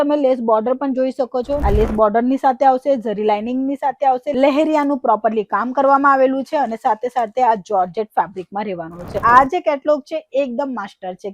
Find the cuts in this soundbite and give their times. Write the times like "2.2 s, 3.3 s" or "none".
1.6 s, 9.2 s